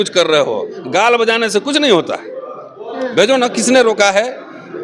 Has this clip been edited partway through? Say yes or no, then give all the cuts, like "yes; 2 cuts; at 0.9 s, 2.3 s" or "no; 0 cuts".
no; 0 cuts